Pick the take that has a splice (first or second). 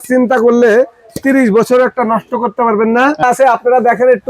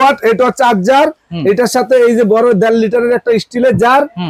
first